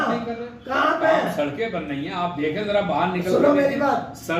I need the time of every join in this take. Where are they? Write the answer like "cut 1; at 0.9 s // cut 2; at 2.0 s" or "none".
none